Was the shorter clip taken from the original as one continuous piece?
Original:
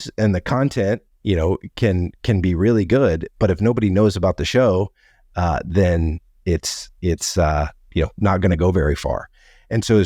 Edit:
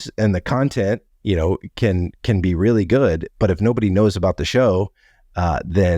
yes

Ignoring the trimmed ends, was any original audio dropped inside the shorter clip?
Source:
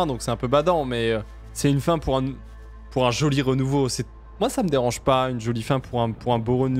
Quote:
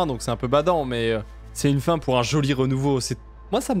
yes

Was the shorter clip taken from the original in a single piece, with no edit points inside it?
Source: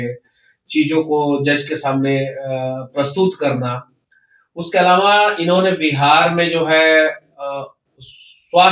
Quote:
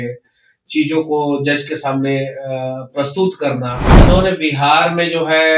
no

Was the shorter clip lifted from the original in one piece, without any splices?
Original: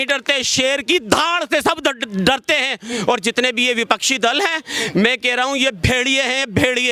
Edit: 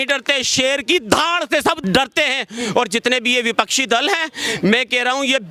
no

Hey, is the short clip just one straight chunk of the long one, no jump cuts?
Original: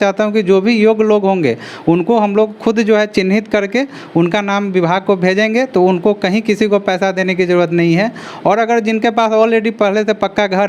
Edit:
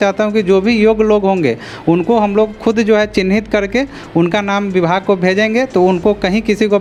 yes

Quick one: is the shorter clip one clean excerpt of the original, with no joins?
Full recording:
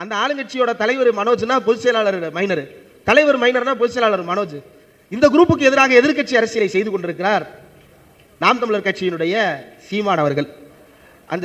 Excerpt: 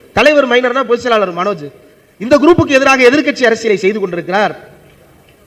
yes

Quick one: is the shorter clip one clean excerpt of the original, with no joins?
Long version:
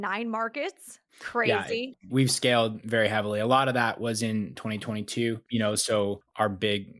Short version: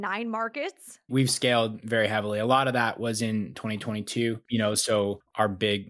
no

